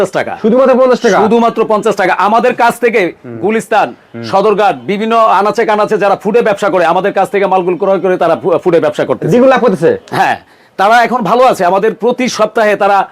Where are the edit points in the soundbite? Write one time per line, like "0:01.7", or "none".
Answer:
none